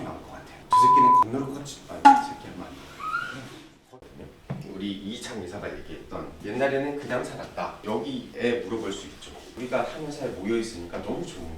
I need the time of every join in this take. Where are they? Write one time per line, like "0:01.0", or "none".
0:03.8